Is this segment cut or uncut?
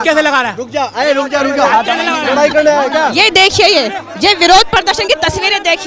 uncut